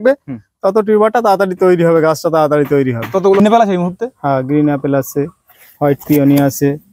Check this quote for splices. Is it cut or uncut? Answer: cut